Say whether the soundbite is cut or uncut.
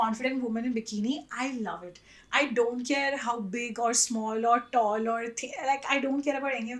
uncut